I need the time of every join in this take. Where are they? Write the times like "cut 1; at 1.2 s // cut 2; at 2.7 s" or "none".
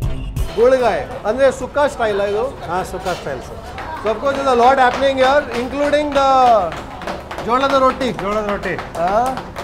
none